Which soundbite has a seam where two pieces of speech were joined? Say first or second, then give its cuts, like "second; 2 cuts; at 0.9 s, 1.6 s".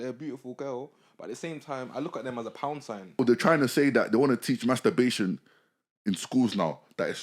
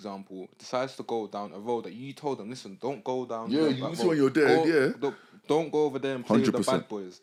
first; 1 cut; at 3.2 s